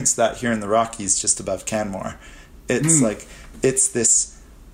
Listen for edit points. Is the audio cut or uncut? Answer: uncut